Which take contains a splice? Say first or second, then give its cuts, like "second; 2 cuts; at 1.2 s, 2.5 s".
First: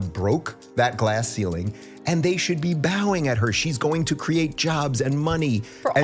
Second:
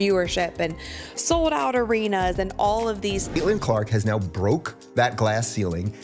second; 1 cut; at 3.2 s